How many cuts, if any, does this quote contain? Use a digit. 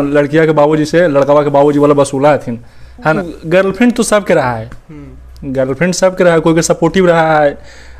1